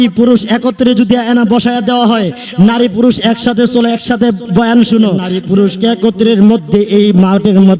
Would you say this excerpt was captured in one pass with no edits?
no; 1 cut; at 5.3 s

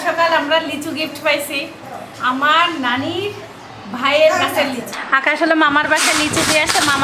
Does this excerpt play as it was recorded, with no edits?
no; 1 cut; at 4.9 s

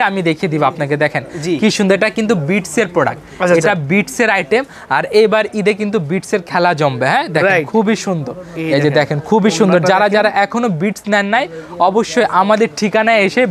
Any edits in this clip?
no; 0 cuts

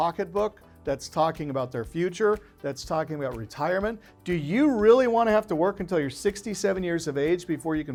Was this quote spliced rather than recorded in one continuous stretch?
no; 0 cuts

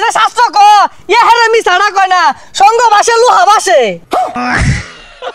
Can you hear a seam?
yes; 1 cut; at 4.4 s

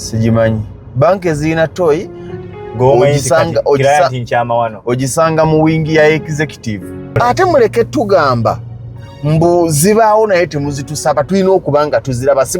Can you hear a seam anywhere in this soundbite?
yes; 1 cut; at 7.2 s

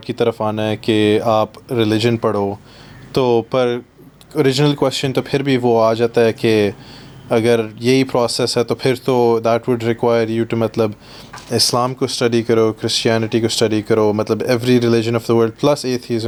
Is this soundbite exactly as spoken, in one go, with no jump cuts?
yes; 0 cuts

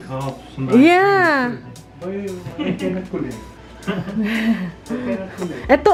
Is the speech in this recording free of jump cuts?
yes; 0 cuts

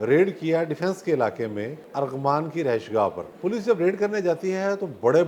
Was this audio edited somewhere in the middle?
yes; 2 cuts; at 1.8 s, 3.3 s

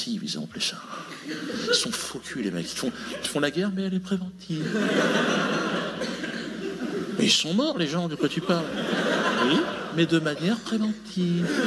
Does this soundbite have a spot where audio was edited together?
no; 0 cuts

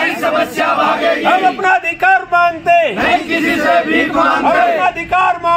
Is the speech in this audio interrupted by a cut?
no; 0 cuts

